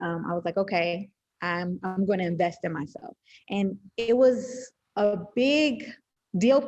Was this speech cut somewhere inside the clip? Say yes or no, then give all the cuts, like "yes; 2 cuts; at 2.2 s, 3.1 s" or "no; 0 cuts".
no; 0 cuts